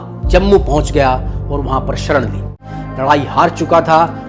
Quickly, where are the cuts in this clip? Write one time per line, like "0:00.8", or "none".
0:02.6